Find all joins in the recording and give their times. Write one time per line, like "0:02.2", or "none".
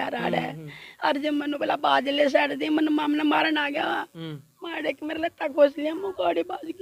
none